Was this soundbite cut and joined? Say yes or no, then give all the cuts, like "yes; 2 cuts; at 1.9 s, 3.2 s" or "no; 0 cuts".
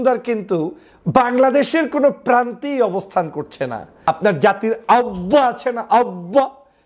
yes; 1 cut; at 4.1 s